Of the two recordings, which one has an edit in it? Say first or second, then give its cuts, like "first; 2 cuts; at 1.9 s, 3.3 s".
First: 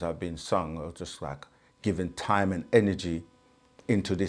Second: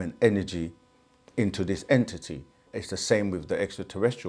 second; 1 cut; at 2.7 s